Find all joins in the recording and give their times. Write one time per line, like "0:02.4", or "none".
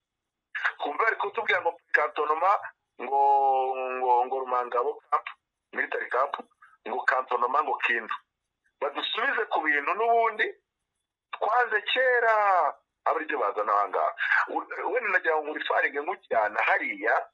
none